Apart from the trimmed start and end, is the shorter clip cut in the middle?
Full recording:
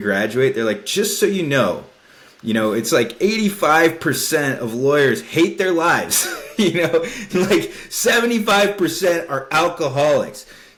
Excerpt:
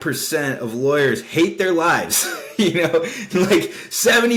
no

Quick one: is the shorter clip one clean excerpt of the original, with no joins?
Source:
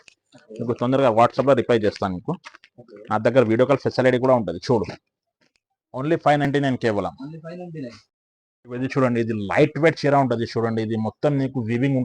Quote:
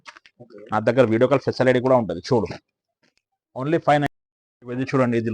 no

